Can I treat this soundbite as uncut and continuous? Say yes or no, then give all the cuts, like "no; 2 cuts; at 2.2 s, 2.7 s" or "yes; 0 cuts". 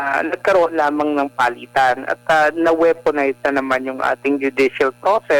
yes; 0 cuts